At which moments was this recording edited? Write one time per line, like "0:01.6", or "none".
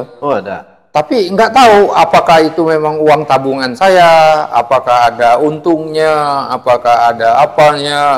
none